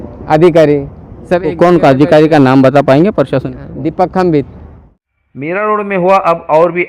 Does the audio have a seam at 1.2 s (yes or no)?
no